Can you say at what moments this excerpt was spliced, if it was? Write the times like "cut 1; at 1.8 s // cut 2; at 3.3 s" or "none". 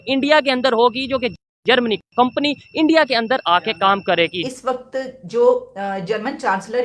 cut 1; at 4.5 s